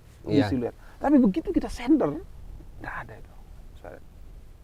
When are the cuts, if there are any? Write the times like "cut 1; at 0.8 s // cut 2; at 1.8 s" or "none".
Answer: none